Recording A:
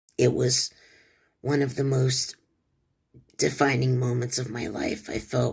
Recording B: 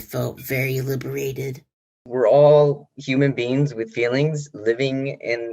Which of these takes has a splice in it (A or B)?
B